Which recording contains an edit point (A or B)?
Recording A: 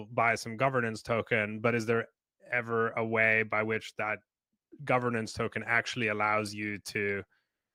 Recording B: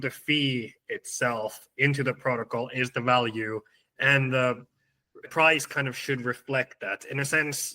B